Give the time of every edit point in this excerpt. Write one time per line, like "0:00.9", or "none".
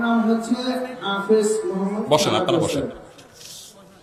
none

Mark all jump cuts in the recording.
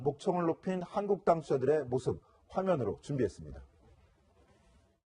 0:02.5

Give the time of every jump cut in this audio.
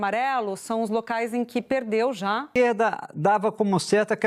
0:02.4

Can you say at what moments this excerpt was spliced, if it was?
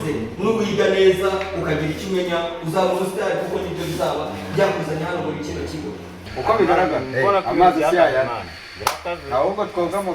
0:06.3

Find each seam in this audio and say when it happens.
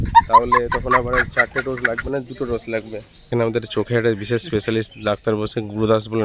0:03.3

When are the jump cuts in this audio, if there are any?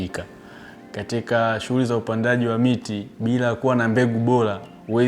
0:03.0

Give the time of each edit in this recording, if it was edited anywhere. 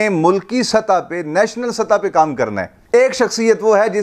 none

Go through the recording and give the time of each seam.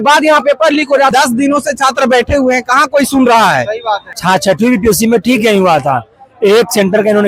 0:01.1
0:04.1

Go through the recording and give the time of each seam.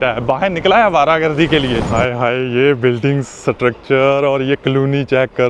0:01.9

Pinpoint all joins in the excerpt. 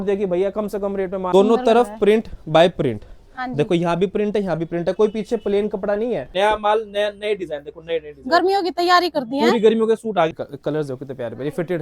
0:01.2
0:06.3
0:10.3

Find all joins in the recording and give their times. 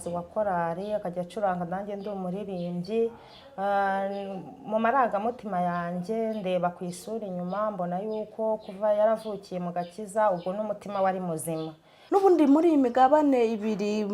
0:11.9

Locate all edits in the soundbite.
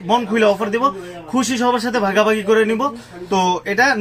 none

